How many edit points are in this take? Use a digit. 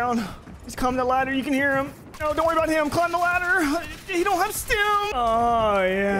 1